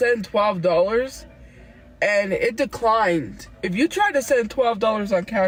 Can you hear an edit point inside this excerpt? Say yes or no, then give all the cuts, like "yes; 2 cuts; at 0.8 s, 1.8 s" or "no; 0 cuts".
no; 0 cuts